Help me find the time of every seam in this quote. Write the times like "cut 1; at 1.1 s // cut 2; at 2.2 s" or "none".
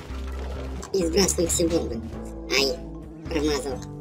none